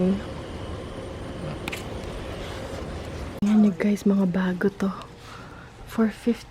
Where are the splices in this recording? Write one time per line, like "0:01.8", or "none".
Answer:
0:03.4